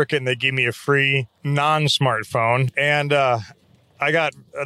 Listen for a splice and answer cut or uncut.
cut